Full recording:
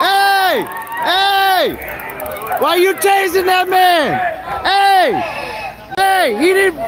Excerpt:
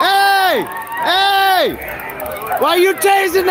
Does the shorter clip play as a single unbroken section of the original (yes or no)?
yes